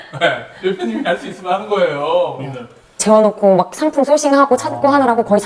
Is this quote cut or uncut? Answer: cut